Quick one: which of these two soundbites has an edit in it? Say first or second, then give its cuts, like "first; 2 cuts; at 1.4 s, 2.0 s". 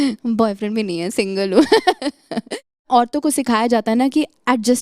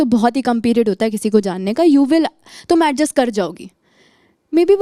first; 1 cut; at 2.8 s